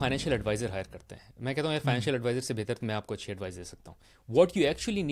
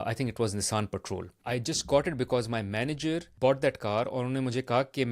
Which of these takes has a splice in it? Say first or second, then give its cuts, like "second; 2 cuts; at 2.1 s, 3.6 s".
second; 2 cuts; at 1.3 s, 3.3 s